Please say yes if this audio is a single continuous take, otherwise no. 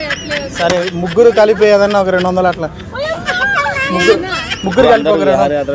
yes